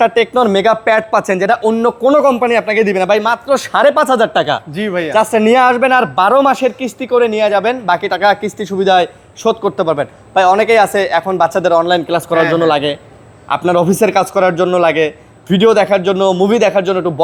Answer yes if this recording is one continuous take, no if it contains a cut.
yes